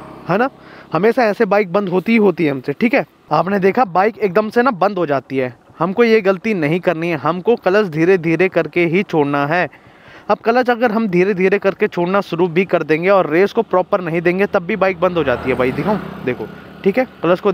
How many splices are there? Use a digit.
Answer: 0